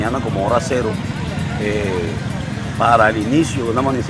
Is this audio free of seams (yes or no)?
yes